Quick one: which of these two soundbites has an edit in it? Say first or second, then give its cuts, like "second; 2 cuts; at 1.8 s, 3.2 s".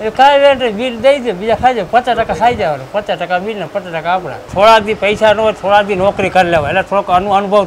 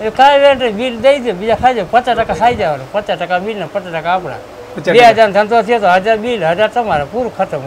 first; 1 cut; at 4.4 s